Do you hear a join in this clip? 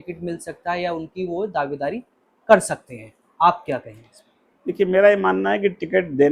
no; 0 cuts

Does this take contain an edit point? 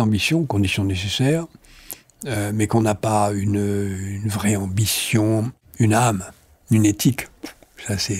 yes; 1 cut; at 5.6 s

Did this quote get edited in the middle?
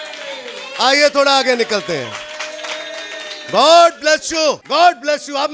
yes; 1 cut; at 4.6 s

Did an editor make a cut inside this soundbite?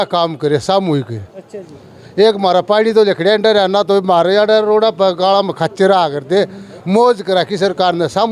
no; 0 cuts

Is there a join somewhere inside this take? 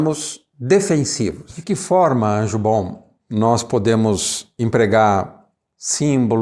yes; 1 cut; at 1.5 s

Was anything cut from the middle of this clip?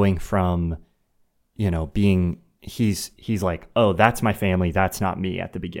no; 0 cuts

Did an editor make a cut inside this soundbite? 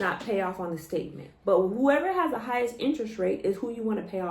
yes; 1 cut; at 1.2 s

